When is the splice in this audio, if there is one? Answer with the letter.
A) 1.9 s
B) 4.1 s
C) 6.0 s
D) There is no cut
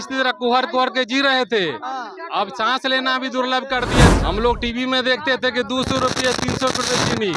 B